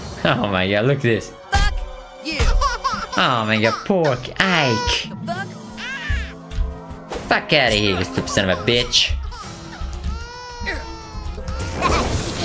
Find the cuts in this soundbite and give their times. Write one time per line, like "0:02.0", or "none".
0:11.5